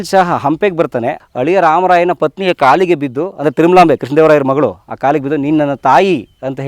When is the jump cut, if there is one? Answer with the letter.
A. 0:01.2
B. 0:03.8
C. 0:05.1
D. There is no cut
A